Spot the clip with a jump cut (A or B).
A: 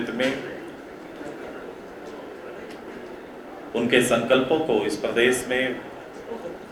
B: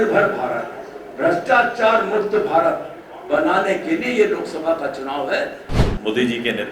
B